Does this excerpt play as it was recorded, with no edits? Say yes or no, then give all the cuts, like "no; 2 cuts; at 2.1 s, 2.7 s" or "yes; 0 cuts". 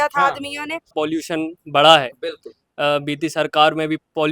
no; 1 cut; at 0.9 s